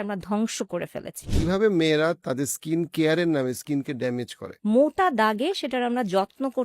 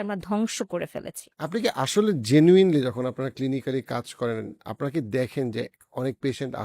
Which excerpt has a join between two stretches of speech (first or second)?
first